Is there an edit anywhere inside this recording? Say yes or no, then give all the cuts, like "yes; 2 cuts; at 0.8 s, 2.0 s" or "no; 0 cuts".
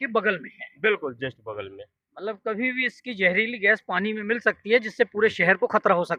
no; 0 cuts